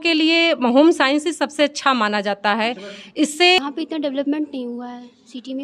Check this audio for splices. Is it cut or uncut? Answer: cut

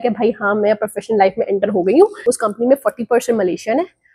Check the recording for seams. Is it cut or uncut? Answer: cut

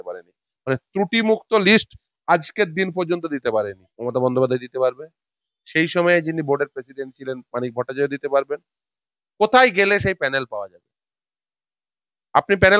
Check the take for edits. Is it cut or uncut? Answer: cut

